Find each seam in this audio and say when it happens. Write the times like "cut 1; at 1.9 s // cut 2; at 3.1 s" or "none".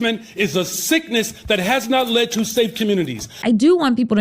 cut 1; at 3.3 s